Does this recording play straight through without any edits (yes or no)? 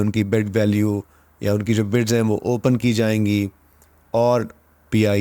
yes